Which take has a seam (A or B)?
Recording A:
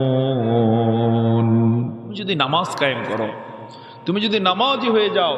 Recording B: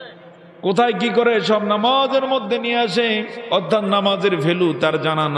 A